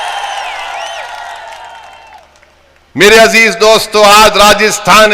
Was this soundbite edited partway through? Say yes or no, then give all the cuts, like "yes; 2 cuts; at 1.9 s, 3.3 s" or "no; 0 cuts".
no; 0 cuts